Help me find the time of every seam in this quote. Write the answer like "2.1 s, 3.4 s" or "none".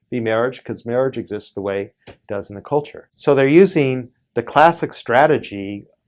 3.0 s